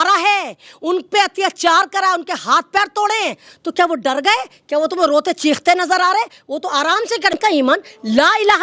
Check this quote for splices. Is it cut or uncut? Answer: cut